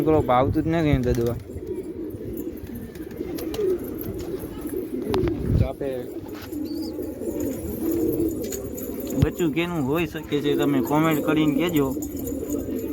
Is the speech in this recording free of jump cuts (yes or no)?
no